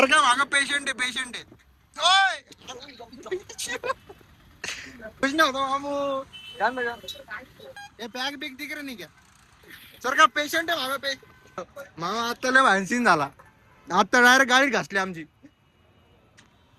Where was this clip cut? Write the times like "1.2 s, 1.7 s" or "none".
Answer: 5.2 s, 7.8 s, 11.7 s